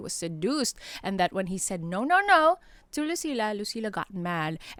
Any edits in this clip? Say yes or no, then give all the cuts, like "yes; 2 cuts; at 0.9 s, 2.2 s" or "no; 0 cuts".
no; 0 cuts